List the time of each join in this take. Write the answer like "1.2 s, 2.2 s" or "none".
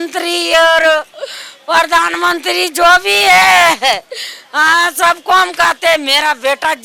none